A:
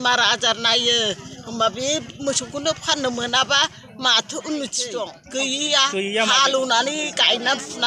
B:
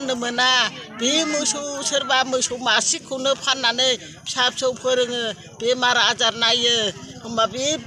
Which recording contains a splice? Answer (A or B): A